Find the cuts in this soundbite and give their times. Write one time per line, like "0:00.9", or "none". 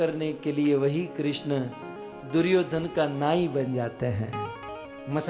none